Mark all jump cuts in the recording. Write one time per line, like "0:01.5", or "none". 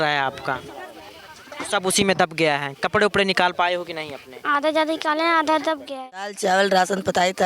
0:06.3